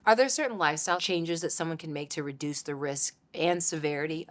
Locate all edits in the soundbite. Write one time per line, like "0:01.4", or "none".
0:01.0